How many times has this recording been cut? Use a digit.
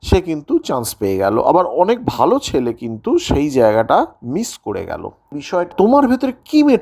1